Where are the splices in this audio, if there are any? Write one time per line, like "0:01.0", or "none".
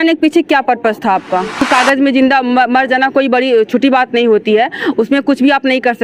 0:01.6